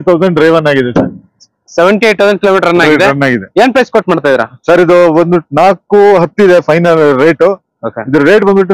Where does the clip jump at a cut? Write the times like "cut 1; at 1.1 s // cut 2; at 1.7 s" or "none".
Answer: none